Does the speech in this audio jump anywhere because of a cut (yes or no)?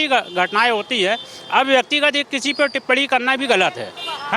no